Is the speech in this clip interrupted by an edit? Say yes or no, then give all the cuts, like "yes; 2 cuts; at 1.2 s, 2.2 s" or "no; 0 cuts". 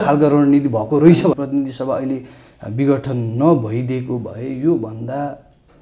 yes; 1 cut; at 1.4 s